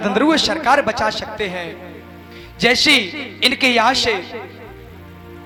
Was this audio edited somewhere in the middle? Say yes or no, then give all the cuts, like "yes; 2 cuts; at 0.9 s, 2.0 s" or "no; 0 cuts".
no; 0 cuts